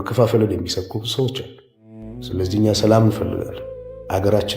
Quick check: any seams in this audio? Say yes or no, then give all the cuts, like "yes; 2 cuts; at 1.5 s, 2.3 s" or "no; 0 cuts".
yes; 1 cut; at 2.2 s